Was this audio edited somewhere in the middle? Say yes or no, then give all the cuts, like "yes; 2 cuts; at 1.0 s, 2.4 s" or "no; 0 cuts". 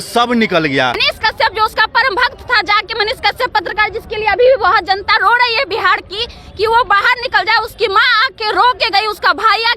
yes; 1 cut; at 1.1 s